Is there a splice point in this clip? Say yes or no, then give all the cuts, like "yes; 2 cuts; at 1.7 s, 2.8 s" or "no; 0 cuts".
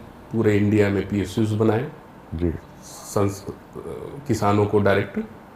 no; 0 cuts